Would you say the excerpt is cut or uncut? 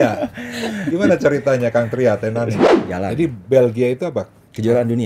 cut